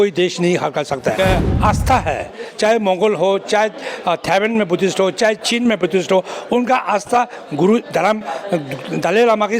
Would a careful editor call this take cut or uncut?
cut